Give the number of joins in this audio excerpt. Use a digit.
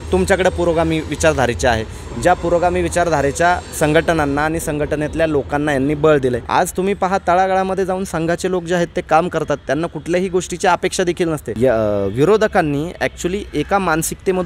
2